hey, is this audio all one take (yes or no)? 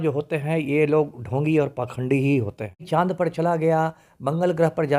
no